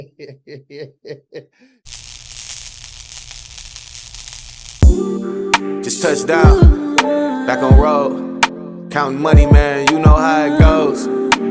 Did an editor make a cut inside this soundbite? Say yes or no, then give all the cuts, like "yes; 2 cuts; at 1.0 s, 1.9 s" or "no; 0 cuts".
yes; 1 cut; at 1.8 s